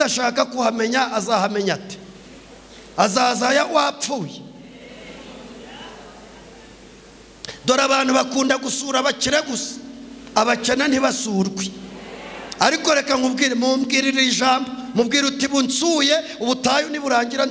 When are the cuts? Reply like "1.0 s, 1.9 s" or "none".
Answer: none